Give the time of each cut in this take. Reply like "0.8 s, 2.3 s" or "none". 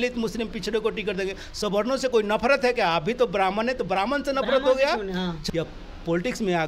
5.3 s